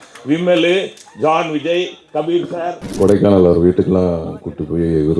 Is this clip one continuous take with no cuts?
no; 1 cut; at 2.9 s

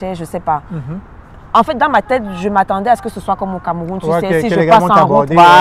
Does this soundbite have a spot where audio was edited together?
no; 0 cuts

